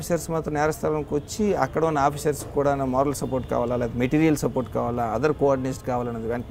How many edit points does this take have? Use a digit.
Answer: 0